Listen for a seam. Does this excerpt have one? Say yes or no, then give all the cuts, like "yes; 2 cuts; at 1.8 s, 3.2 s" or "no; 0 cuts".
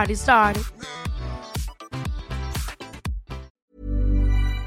yes; 1 cut; at 3.6 s